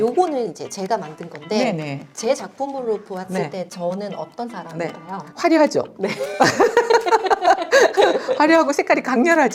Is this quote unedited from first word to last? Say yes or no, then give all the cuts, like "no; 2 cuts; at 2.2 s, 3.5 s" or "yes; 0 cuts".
yes; 0 cuts